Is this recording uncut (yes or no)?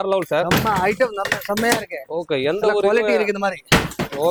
yes